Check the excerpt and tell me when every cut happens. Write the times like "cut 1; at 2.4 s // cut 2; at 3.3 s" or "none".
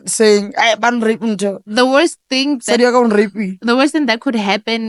none